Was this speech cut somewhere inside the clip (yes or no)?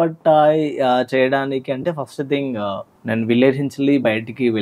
yes